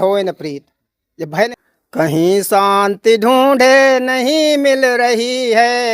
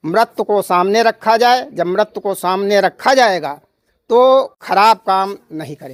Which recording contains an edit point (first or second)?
first